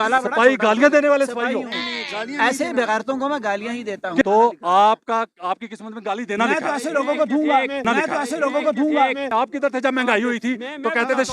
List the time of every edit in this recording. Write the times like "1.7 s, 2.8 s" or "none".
1.6 s, 4.3 s, 9.1 s